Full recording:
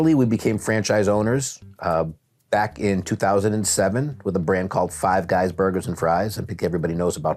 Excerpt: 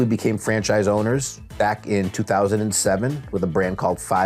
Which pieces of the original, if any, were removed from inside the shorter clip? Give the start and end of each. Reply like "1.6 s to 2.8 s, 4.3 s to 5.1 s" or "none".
1.6 s to 2.3 s